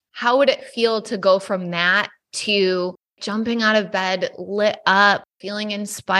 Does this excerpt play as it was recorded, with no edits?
yes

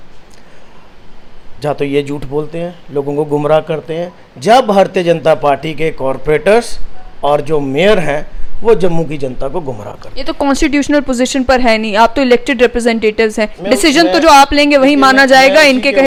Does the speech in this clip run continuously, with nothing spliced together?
yes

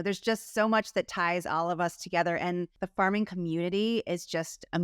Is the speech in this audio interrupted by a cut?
yes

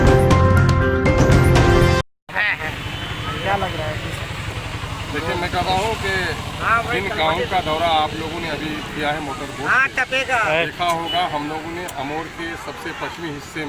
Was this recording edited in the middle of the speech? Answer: no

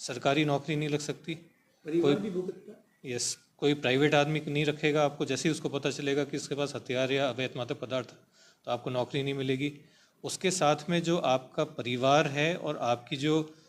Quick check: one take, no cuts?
yes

